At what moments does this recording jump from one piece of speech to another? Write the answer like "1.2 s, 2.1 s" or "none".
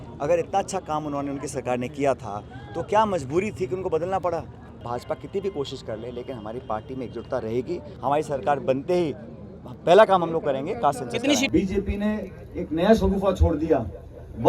4.8 s, 7.9 s, 11.5 s